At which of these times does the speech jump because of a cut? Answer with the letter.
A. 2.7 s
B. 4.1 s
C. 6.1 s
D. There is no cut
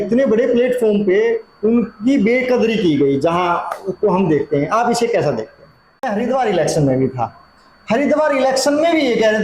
C